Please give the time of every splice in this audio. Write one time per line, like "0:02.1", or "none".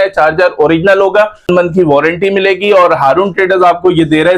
0:01.5

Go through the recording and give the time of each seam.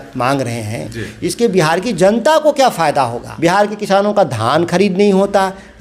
0:03.2

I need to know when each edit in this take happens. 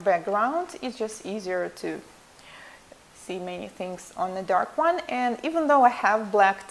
none

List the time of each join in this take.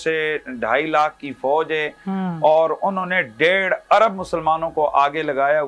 none

